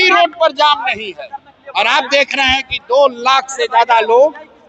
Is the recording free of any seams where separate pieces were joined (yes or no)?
yes